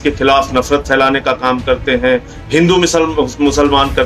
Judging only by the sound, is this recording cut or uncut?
uncut